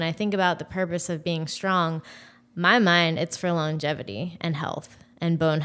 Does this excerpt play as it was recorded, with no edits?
yes; 0 cuts

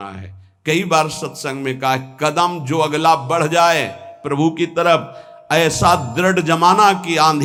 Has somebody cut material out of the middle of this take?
no; 0 cuts

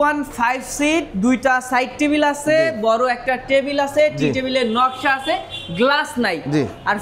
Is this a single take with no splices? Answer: yes; 0 cuts

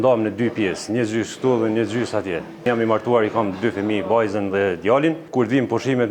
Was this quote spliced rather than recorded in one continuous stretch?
yes; 2 cuts; at 2.7 s, 5.2 s

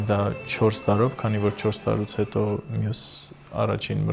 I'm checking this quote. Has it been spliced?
no; 0 cuts

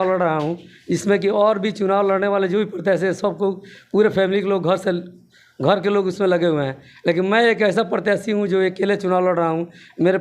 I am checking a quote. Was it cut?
no; 0 cuts

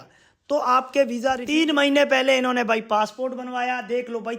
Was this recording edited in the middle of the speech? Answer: yes; 1 cut; at 1.4 s

